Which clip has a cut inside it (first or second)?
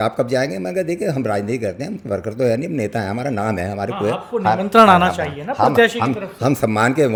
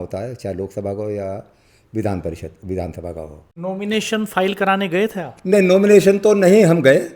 second